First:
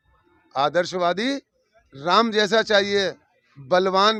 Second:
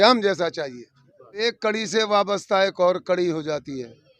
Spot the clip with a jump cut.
second; 1 cut; at 1.3 s

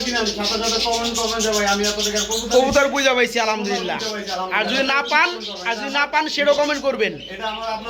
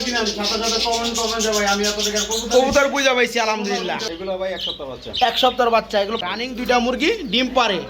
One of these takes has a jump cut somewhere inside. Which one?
second; 2 cuts; at 4.1 s, 6.2 s

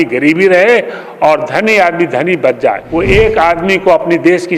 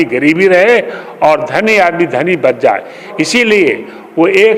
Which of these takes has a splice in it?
first; 1 cut; at 2.8 s

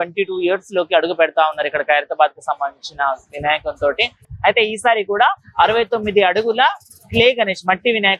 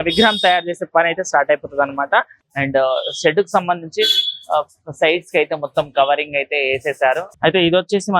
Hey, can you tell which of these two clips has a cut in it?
second; 2 cuts; at 2.4 s, 7.3 s

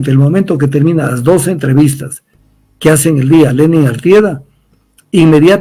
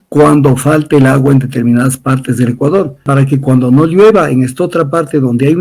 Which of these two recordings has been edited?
second; 1 cut; at 3.1 s

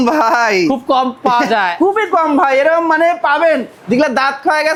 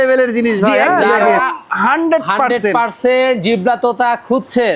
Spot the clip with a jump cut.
second; 1 cut; at 1.3 s

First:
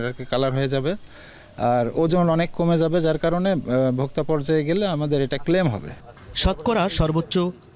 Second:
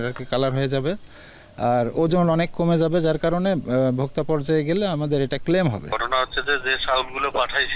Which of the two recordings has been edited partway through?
second; 1 cut; at 5.9 s

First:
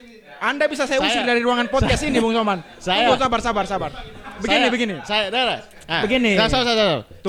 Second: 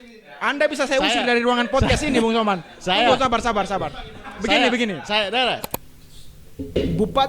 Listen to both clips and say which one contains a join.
second; 1 cut; at 5.7 s

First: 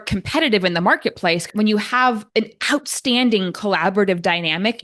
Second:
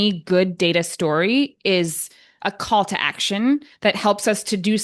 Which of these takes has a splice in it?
first; 2 cuts; at 1.4 s, 2.2 s

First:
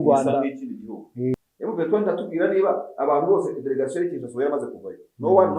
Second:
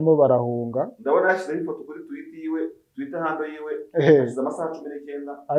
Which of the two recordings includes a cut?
first; 1 cut; at 1.3 s

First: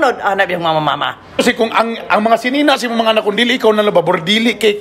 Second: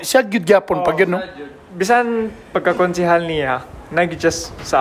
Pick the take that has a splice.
first; 1 cut; at 1.3 s

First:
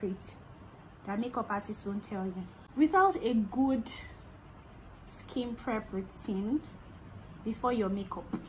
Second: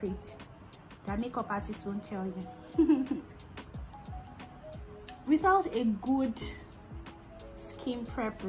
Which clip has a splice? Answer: first; 1 cut; at 2.6 s

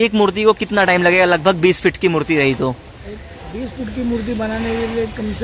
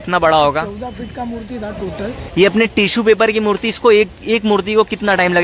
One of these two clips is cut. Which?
second; 1 cut; at 2.2 s

